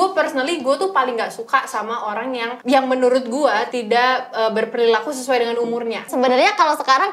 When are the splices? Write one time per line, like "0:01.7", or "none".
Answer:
0:02.5
0:03.7
0:06.1

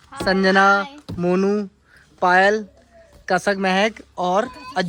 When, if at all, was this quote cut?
none

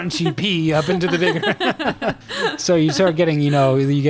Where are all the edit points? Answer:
0:02.2

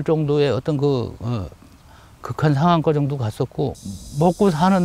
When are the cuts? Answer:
none

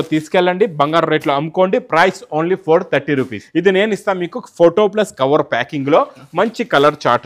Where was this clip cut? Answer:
0:03.4

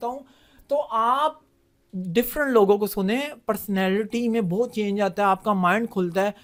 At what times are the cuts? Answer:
none

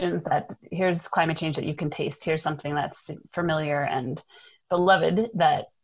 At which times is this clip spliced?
none

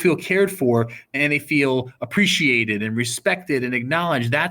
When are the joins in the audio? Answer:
0:01.1

